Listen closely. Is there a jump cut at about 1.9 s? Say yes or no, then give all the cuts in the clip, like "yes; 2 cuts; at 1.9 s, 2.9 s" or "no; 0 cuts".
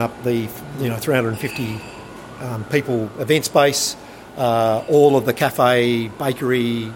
no; 0 cuts